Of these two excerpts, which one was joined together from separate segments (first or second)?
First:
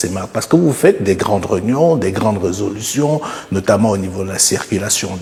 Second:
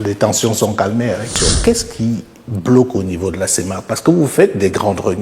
second